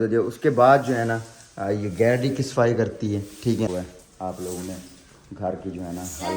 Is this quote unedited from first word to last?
no; 1 cut; at 3.7 s

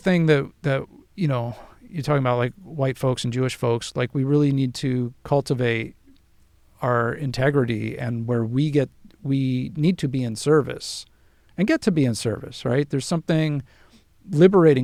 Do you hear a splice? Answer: no; 0 cuts

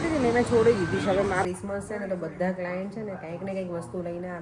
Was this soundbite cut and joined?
yes; 1 cut; at 1.4 s

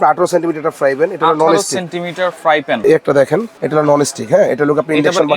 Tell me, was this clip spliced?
yes; 1 cut; at 2.8 s

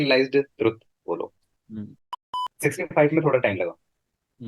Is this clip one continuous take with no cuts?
no; 1 cut; at 2.2 s

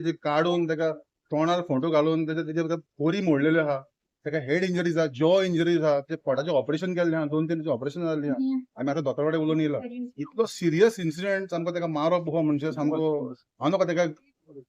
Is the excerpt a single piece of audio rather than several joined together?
yes; 0 cuts

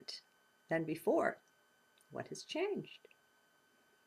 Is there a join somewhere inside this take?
yes; 1 cut; at 2.0 s

